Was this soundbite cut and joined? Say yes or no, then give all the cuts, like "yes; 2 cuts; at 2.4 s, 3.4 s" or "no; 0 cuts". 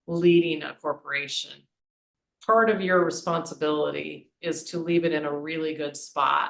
yes; 1 cut; at 1.7 s